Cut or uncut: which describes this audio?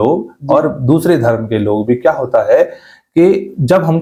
uncut